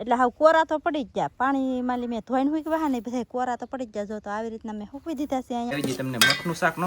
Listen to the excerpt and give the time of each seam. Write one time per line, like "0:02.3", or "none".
0:05.8